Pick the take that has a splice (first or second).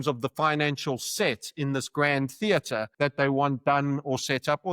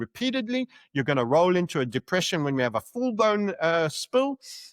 first